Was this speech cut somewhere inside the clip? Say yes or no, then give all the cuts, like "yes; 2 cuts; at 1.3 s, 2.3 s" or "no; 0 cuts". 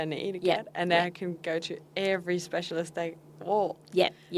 no; 0 cuts